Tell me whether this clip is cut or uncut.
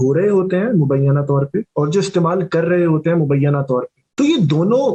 cut